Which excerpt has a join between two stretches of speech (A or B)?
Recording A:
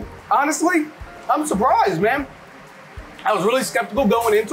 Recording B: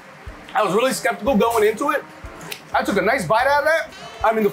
A